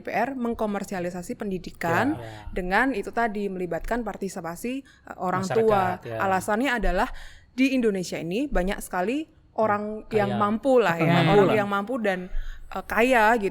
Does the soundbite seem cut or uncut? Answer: uncut